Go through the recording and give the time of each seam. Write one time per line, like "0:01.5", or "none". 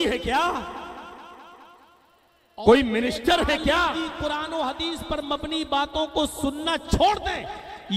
0:03.9